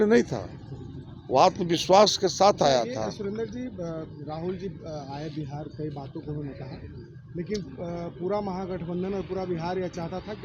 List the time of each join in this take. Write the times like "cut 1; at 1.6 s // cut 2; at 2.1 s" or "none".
none